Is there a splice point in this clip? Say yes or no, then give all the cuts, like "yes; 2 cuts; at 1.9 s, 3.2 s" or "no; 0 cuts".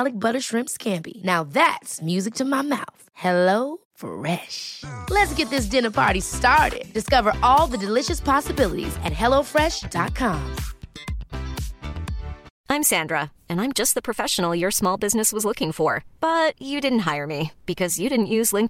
yes; 1 cut; at 12.5 s